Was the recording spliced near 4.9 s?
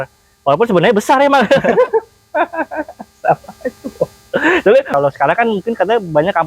yes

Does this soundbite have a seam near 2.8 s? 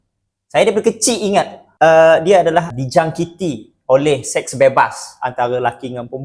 yes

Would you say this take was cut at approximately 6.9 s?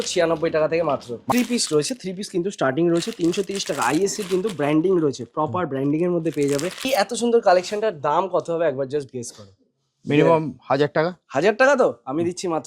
yes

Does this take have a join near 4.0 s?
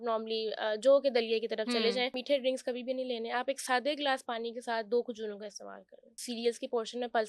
no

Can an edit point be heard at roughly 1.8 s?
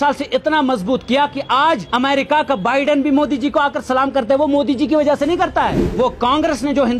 yes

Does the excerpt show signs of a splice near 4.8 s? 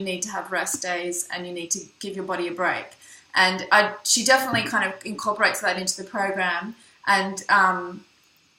no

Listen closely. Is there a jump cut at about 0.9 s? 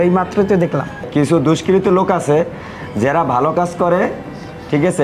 yes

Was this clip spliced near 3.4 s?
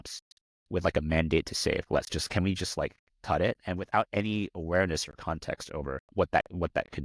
no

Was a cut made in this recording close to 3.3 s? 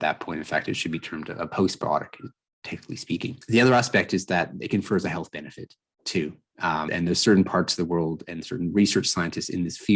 yes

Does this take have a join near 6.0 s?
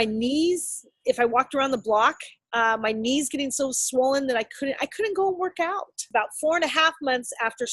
yes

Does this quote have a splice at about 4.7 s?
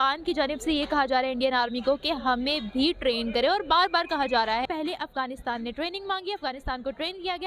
yes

